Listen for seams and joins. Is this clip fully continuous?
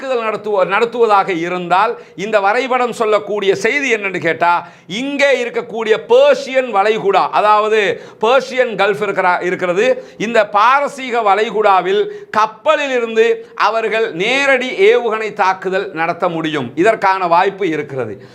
yes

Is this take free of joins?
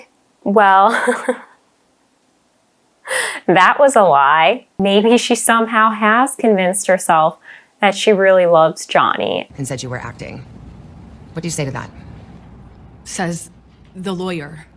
no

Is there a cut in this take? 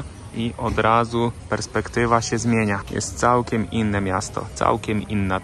no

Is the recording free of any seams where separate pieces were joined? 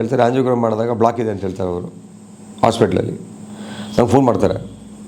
yes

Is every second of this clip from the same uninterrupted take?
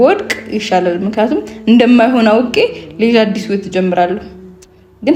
yes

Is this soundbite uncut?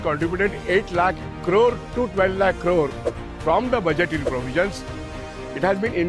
yes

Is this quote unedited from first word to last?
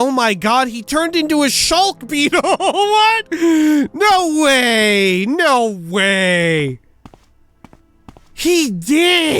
no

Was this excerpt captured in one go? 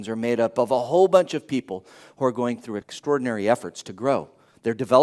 no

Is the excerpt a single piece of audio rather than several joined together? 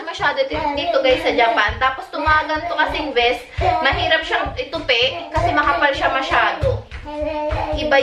yes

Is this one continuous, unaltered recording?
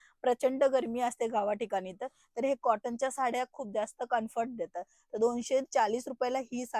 yes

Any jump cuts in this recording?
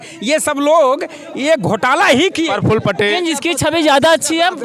yes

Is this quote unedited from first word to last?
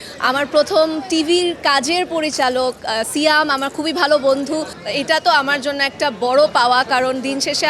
no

